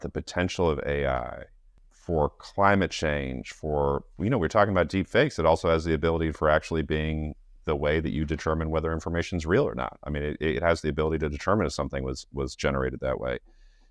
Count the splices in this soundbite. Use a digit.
0